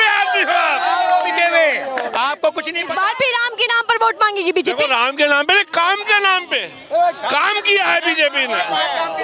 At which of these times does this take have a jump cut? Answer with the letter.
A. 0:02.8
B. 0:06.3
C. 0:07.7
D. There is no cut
A